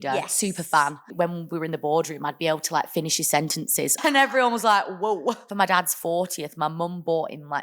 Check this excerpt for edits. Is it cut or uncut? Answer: cut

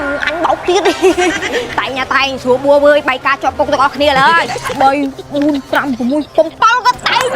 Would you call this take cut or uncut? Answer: cut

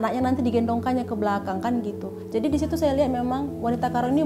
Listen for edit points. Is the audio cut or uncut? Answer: cut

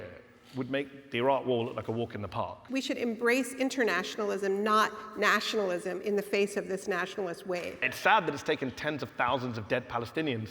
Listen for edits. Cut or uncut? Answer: cut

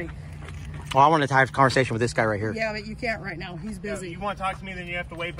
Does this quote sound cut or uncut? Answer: uncut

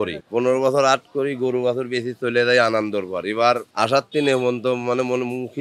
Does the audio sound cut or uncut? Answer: cut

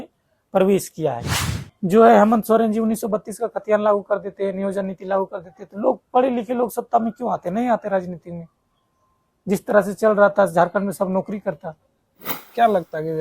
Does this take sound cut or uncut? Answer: cut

